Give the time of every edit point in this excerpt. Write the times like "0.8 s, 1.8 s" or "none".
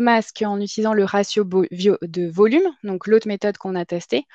none